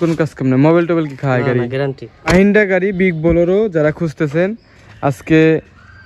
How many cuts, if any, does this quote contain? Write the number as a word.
one